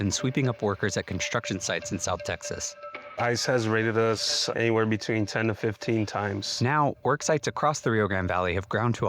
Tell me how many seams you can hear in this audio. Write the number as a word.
one